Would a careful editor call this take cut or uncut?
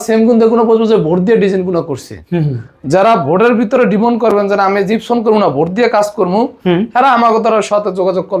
uncut